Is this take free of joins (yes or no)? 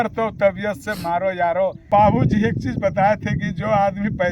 no